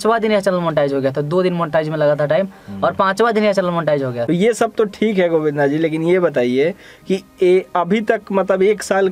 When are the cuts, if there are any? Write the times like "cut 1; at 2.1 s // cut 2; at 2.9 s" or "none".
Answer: cut 1; at 4.2 s